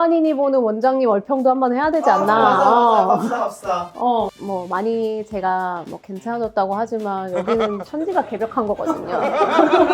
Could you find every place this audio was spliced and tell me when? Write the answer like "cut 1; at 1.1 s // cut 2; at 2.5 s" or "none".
none